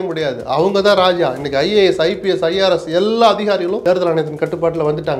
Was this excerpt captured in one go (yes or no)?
no